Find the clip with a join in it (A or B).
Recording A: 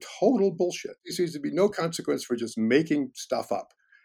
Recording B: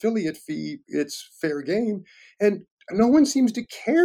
A